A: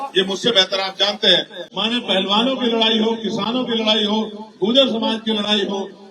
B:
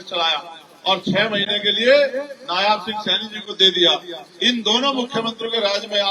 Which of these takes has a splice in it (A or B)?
A